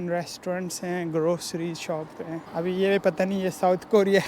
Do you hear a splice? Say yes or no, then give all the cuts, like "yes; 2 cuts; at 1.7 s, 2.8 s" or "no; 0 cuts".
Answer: yes; 1 cut; at 2.4 s